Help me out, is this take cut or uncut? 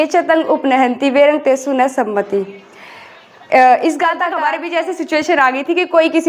cut